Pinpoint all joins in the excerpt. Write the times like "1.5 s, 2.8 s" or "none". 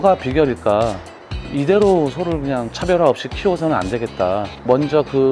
none

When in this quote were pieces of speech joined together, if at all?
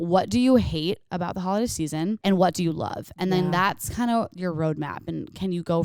2.2 s

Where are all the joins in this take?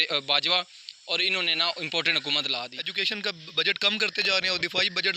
2.8 s

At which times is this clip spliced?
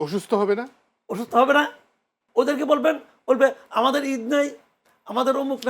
2.2 s

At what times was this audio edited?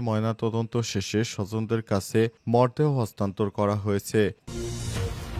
4.4 s

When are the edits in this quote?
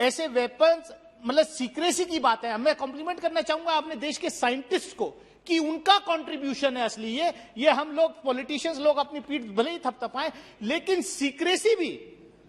none

